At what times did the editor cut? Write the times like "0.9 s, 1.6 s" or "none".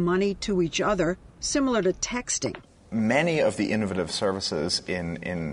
2.8 s